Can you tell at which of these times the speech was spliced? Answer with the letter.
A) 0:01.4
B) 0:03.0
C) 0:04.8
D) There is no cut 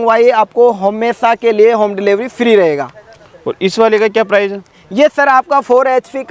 D